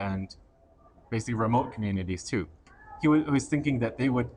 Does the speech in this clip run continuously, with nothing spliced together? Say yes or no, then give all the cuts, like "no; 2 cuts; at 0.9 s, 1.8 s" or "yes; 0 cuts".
no; 1 cut; at 2.6 s